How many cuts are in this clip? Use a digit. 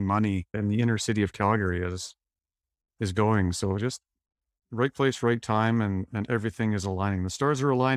0